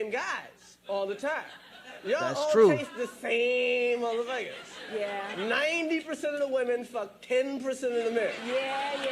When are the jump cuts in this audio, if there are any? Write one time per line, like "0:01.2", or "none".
none